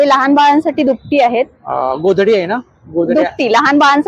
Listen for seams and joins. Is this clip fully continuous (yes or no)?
yes